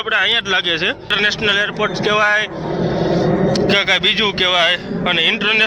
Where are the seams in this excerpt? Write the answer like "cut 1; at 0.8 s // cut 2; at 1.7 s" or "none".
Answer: cut 1; at 1.1 s